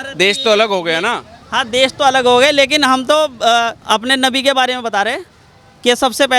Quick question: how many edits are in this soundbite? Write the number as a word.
one